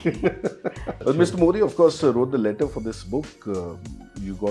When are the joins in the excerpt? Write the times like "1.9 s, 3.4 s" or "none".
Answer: 1.0 s